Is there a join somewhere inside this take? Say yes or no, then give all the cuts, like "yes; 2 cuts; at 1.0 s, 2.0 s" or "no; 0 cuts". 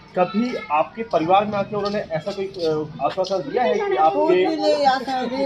no; 0 cuts